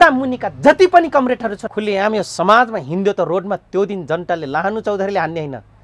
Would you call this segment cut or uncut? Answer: cut